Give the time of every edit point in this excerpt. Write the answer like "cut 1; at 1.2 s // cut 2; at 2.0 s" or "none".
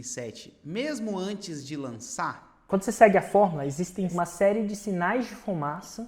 cut 1; at 2.6 s // cut 2; at 4.1 s